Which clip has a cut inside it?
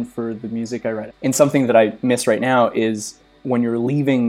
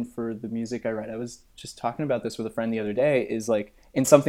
first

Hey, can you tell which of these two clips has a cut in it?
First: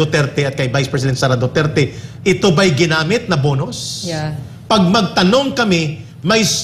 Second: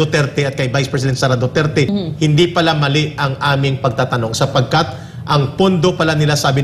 second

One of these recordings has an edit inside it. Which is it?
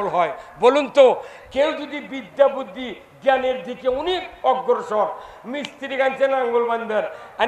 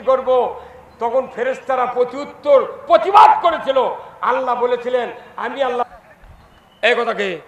second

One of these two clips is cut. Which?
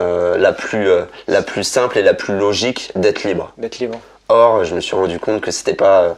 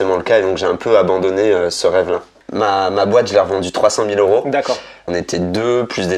second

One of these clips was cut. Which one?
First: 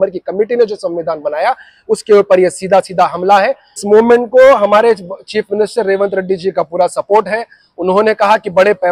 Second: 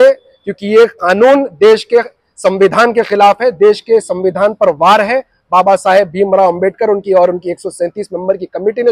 first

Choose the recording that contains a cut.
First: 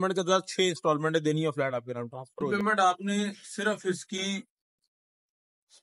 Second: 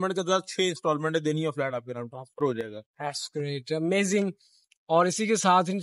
first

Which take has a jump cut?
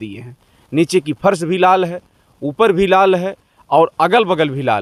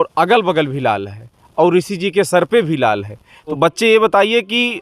second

